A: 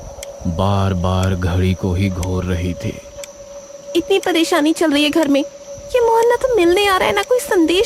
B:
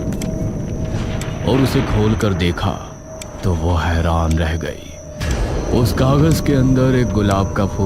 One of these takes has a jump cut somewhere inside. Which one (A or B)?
B